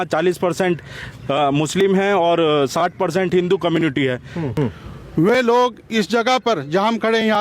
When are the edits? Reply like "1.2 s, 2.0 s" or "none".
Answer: 4.5 s